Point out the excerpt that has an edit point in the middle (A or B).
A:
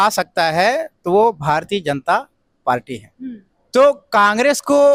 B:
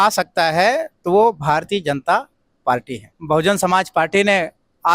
B